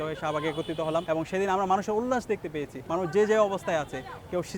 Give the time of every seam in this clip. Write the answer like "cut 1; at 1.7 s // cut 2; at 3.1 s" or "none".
cut 1; at 1.0 s // cut 2; at 2.7 s